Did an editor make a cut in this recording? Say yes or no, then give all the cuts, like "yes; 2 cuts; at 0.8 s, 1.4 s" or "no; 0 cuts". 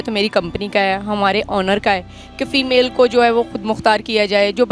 no; 0 cuts